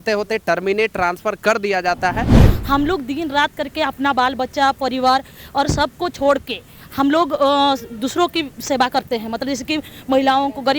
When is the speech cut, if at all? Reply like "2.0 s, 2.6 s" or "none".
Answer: 2.4 s